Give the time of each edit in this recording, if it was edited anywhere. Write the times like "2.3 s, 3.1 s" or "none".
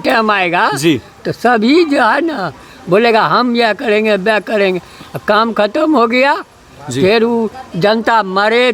none